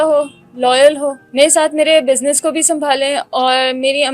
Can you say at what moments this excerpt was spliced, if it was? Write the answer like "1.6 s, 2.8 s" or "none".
1.2 s